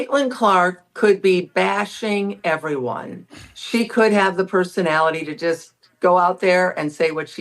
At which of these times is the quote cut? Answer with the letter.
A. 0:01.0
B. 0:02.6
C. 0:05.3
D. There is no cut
C